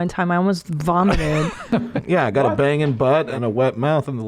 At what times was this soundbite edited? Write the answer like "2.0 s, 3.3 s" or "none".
2.0 s, 3.3 s